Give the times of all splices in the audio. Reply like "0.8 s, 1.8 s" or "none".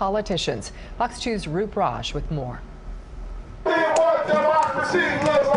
1.2 s